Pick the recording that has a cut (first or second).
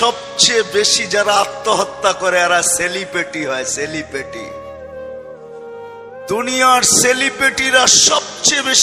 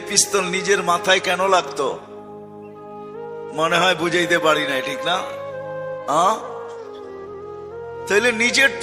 second